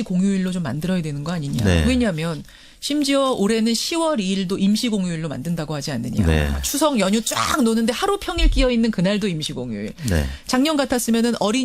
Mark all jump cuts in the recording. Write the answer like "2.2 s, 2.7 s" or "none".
1.3 s